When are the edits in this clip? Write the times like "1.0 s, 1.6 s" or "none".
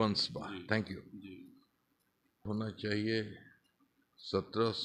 2.4 s